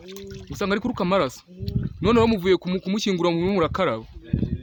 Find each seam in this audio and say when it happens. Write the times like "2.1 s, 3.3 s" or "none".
none